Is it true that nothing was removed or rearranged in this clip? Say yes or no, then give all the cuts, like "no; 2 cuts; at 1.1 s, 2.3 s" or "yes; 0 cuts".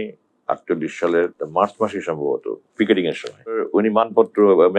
no; 2 cuts; at 1.4 s, 3.6 s